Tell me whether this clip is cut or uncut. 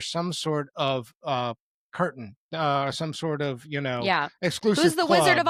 uncut